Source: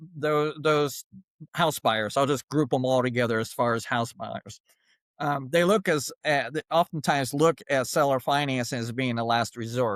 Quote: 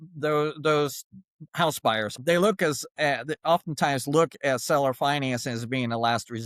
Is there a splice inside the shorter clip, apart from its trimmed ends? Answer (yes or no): yes